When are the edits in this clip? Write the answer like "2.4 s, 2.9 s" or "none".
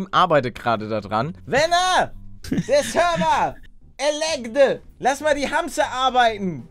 1.4 s, 4.8 s